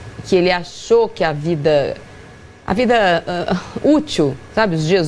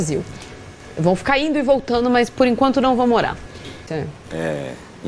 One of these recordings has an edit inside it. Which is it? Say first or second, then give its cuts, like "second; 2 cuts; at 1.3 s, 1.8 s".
second; 1 cut; at 3.9 s